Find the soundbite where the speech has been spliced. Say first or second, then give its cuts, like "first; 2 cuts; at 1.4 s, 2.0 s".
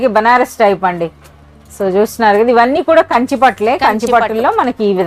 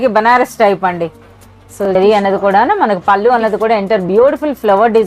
second; 1 cut; at 1.8 s